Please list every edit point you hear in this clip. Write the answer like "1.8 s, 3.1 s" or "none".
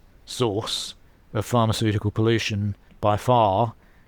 2.9 s

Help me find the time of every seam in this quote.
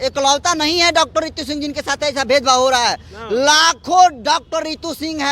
none

